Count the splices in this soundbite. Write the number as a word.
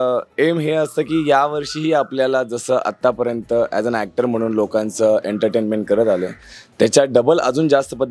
zero